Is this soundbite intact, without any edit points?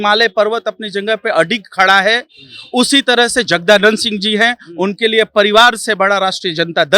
yes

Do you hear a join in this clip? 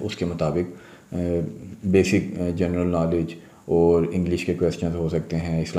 no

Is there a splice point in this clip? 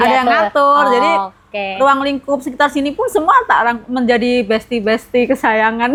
no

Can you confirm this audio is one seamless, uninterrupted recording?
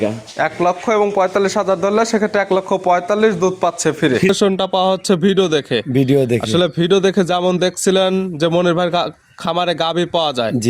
no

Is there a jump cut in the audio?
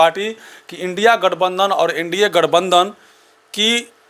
no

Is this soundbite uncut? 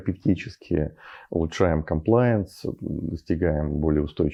yes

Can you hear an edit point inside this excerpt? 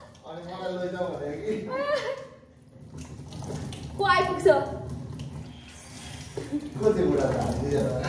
no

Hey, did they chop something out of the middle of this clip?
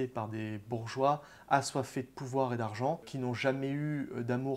yes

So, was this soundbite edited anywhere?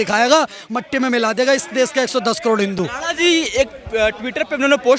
no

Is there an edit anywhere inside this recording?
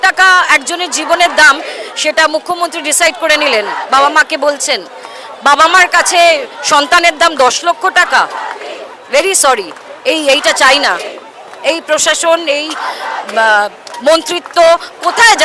no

